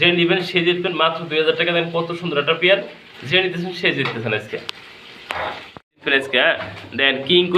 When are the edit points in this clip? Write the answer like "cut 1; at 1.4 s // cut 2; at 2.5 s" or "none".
cut 1; at 6.0 s